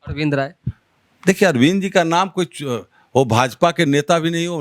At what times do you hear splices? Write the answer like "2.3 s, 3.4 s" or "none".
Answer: none

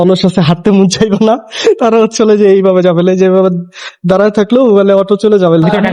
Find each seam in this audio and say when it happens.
none

